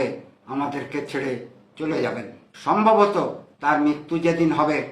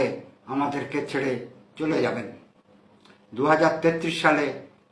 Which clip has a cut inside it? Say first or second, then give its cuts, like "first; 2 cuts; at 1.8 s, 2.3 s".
first; 1 cut; at 2.5 s